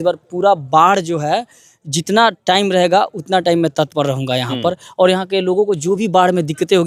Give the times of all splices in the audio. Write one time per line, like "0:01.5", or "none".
none